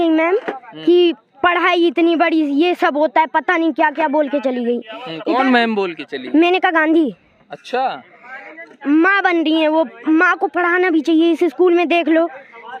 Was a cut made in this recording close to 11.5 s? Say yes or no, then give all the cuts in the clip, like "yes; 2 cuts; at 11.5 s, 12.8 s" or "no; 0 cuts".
no; 0 cuts